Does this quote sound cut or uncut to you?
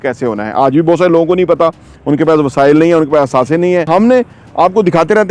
cut